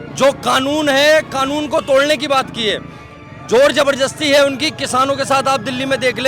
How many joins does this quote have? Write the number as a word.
zero